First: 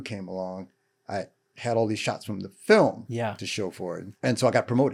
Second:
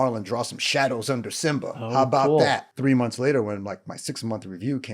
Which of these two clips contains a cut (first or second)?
second